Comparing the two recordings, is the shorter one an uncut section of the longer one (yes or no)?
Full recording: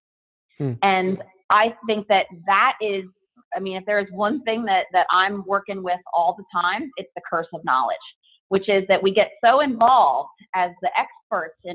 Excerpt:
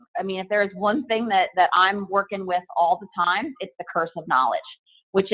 yes